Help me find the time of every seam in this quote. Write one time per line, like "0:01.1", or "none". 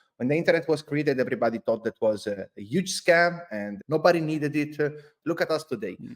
0:03.7
0:05.1